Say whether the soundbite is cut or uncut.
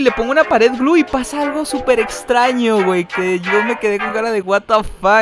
uncut